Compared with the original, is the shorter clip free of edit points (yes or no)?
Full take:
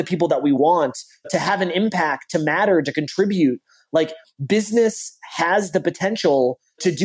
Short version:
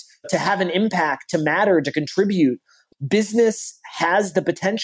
no